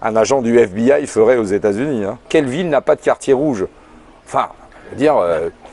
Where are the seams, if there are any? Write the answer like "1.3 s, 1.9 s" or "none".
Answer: 2.3 s